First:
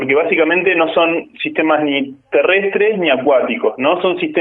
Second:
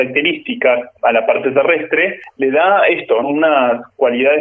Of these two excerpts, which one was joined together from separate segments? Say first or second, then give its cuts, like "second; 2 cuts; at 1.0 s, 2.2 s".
second; 3 cuts; at 0.9 s, 2.2 s, 3.2 s